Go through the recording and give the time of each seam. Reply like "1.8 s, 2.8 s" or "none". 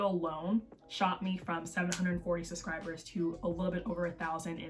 none